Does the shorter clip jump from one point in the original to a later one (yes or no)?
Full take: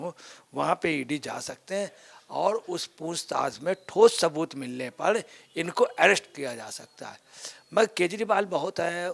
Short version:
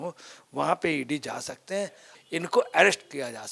yes